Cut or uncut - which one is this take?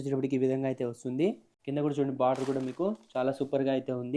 cut